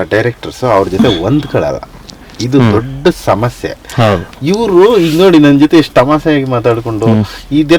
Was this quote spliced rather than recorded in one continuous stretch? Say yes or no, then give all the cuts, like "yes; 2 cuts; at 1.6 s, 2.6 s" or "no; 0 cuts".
no; 0 cuts